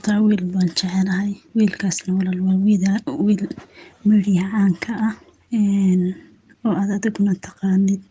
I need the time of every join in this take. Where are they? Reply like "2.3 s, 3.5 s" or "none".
1.4 s, 5.3 s